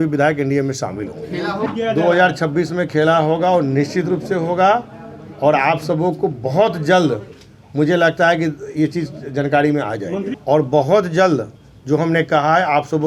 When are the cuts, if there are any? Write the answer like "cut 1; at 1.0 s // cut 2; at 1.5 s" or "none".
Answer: cut 1; at 1.7 s // cut 2; at 10.3 s